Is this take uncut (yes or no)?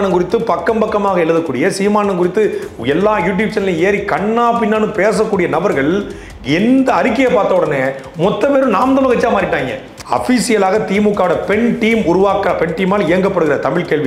no